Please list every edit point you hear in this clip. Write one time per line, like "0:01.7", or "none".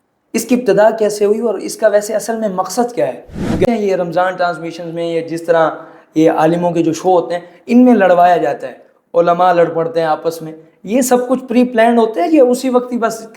0:03.6